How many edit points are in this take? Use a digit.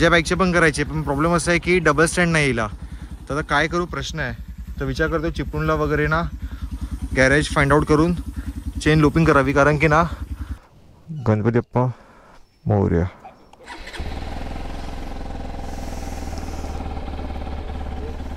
0